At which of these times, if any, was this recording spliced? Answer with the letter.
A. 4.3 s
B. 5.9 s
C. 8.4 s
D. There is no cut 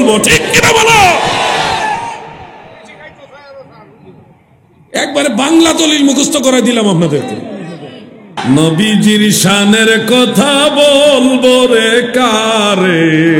C